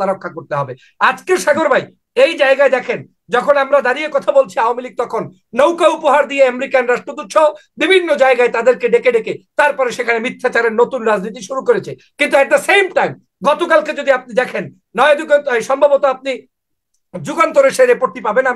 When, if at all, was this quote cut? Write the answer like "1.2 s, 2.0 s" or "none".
none